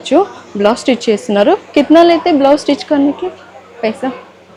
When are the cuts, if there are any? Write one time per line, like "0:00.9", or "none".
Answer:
none